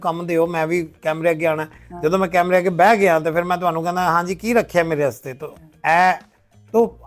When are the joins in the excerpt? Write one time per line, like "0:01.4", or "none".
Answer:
none